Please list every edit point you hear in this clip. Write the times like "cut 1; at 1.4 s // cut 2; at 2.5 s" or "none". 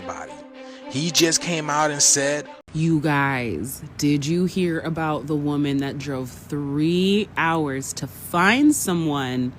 cut 1; at 2.6 s